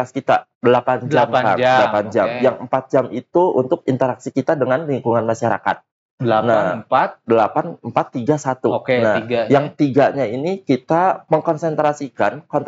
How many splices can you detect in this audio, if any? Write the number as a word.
one